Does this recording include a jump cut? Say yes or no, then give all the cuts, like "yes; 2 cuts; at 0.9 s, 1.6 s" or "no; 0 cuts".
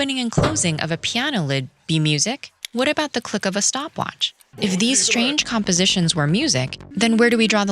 yes; 3 cuts; at 2.5 s, 4.4 s, 6.8 s